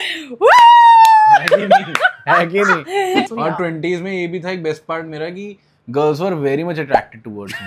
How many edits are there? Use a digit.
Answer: 1